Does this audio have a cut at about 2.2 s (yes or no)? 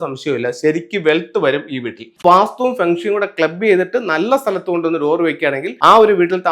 yes